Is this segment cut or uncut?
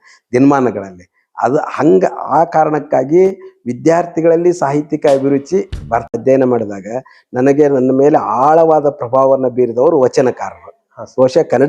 cut